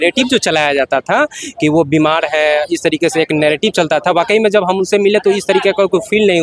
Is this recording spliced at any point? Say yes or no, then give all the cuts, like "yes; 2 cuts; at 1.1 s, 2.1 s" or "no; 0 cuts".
no; 0 cuts